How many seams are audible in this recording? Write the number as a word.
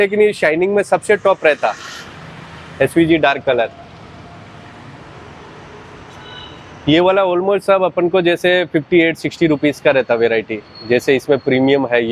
zero